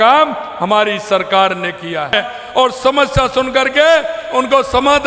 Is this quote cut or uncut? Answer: cut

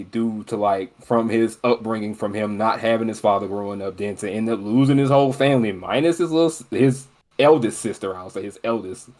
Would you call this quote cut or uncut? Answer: uncut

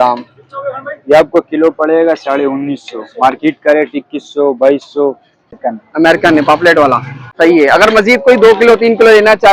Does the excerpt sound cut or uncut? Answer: cut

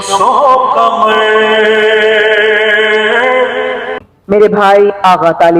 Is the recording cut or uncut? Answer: cut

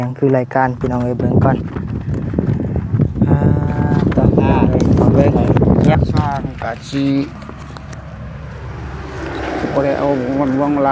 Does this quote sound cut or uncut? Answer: cut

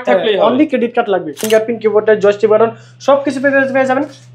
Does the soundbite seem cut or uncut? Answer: cut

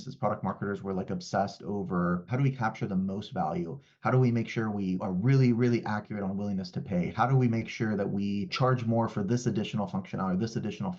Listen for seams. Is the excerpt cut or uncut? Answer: cut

